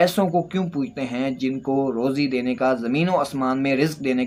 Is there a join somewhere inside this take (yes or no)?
no